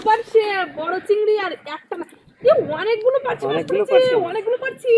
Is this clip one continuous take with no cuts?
yes; 0 cuts

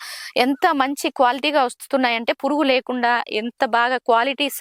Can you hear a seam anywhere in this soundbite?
no; 0 cuts

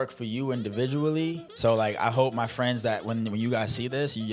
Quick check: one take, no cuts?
no; 1 cut; at 1.5 s

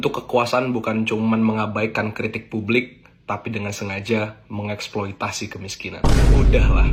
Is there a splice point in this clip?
no; 0 cuts

